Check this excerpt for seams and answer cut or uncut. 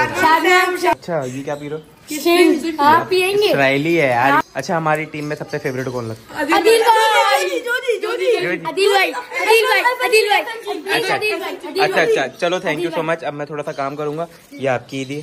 cut